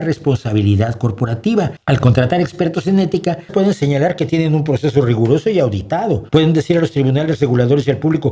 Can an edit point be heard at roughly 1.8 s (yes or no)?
yes